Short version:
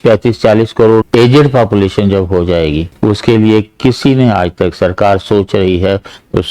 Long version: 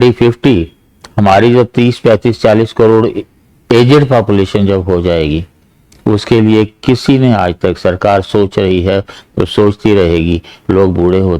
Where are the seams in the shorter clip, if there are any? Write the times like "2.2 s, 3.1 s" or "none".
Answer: 1.1 s, 2.9 s